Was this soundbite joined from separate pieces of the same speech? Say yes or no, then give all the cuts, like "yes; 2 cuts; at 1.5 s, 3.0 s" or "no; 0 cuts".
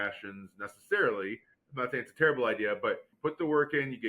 yes; 1 cut; at 3.1 s